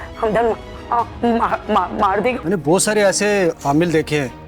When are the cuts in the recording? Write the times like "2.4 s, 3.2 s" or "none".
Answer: 2.4 s